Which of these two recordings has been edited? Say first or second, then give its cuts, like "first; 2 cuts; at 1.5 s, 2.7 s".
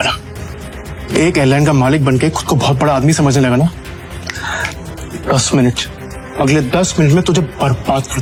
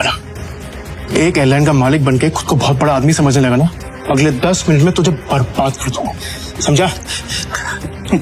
second; 1 cut; at 3.9 s